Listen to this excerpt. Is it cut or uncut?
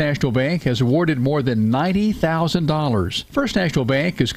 uncut